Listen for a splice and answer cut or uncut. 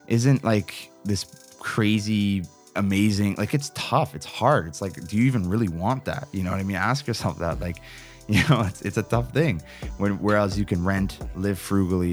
uncut